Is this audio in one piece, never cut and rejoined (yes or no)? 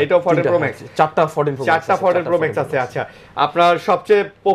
yes